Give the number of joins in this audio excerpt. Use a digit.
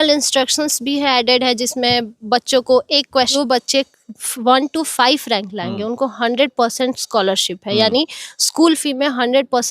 1